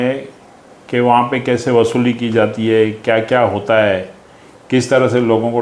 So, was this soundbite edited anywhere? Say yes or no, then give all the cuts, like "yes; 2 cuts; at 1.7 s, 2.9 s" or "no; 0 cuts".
no; 0 cuts